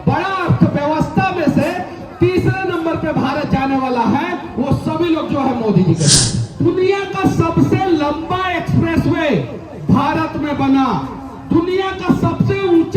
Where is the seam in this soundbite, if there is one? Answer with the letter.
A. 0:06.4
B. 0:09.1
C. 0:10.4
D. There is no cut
A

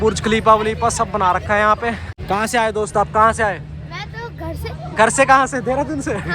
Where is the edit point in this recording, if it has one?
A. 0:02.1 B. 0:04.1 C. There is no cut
A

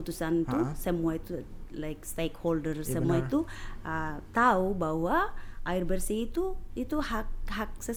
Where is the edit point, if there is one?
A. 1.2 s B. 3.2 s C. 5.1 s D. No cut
D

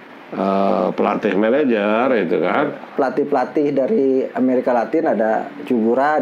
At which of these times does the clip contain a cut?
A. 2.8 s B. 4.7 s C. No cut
A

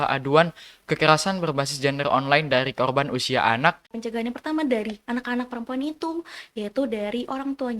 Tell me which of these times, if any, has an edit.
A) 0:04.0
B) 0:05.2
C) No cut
A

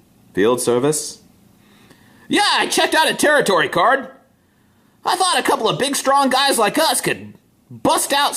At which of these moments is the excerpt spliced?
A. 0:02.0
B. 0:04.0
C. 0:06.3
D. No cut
D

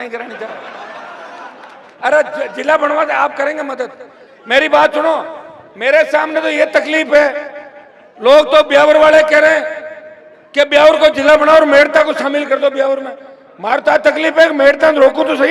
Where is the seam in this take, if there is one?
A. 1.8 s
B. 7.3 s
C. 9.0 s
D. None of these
A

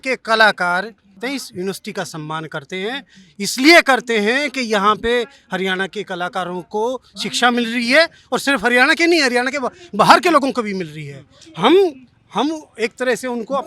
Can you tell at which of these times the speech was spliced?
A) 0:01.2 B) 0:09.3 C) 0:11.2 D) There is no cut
A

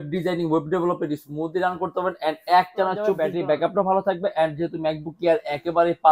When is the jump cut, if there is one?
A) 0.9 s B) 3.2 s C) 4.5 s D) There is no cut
B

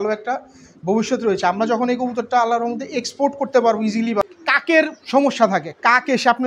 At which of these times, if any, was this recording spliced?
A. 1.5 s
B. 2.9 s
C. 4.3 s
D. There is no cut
C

